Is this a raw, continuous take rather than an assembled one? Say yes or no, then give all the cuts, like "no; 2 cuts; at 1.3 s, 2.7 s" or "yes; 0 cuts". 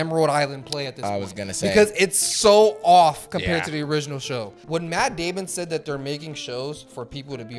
no; 1 cut; at 4.6 s